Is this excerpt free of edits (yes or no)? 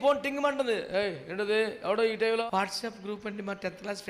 no